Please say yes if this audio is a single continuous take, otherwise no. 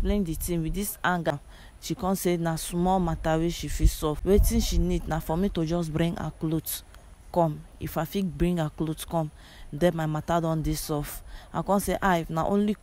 no